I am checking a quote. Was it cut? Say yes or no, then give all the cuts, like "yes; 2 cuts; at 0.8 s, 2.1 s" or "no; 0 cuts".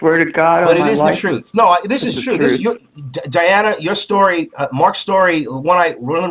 no; 0 cuts